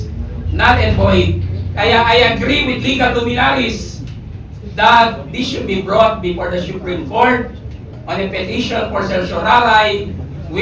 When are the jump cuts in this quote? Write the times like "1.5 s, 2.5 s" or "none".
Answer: none